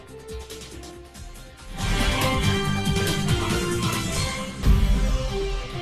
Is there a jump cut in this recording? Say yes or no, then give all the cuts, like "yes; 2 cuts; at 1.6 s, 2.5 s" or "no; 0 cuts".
yes; 1 cut; at 4.6 s